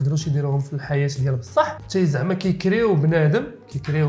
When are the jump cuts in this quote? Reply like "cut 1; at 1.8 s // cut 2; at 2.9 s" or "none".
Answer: cut 1; at 1.8 s